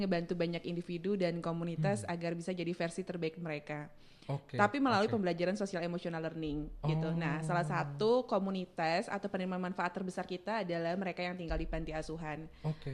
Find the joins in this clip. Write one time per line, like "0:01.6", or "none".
none